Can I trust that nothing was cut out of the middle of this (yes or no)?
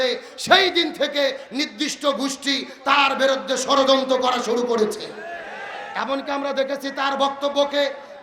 yes